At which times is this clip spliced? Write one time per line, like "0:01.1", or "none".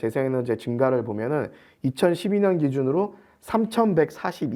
none